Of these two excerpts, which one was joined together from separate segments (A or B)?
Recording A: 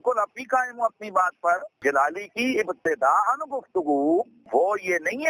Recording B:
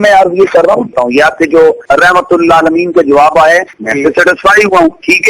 B